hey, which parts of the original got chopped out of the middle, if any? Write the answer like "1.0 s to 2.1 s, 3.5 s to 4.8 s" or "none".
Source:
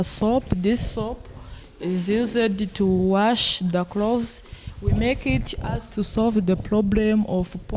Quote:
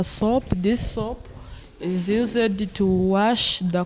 none

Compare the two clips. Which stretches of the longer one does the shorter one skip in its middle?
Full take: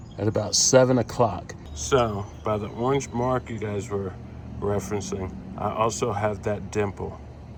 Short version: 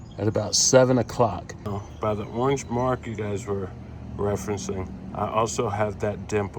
1.8 s to 2.2 s

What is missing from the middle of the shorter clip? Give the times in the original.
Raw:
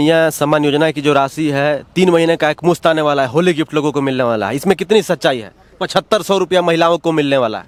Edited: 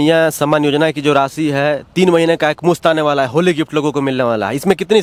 none

